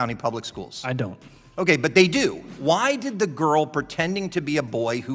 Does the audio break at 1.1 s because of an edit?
no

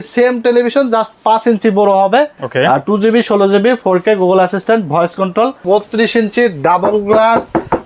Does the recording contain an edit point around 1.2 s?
no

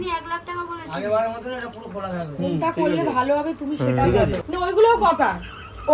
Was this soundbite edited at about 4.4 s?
yes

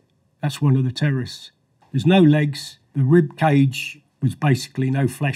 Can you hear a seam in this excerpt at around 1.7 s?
yes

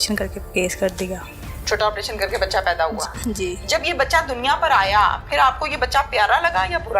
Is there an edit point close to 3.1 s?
yes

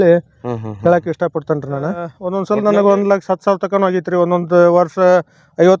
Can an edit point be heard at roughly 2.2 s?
yes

